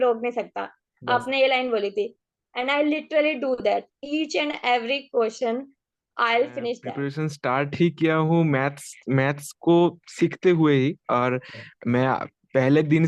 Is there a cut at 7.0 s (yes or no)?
yes